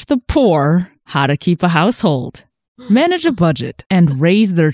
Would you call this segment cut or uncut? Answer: cut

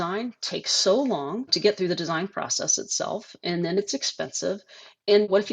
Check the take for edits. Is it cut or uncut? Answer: cut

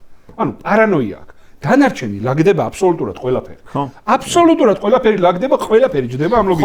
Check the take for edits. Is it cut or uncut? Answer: uncut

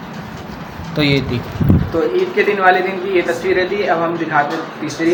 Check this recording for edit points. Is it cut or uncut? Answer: uncut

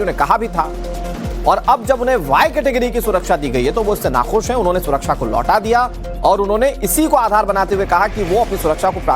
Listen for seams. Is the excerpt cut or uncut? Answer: cut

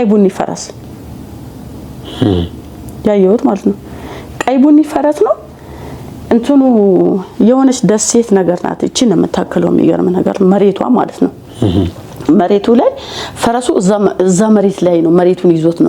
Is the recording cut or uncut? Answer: uncut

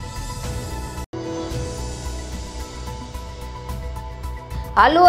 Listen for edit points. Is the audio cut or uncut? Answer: uncut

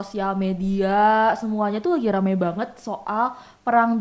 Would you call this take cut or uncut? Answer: uncut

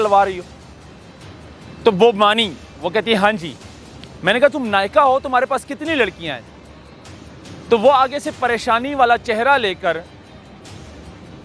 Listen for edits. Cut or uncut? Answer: uncut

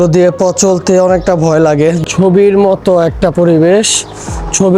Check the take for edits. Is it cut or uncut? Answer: cut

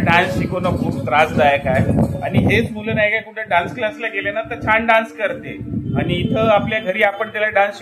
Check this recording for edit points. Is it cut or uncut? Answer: uncut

